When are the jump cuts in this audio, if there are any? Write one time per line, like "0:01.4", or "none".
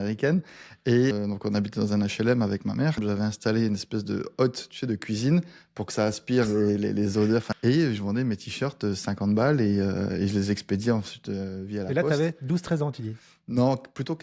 0:01.1
0:03.0
0:07.5